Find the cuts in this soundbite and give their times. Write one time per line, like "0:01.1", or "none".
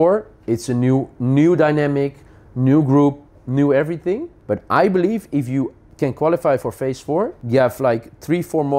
0:04.3
0:05.8
0:07.4